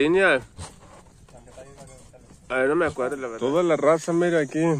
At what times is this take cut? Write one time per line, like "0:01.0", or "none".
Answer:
0:03.2